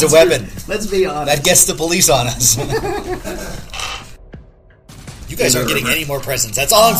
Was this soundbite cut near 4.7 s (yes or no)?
yes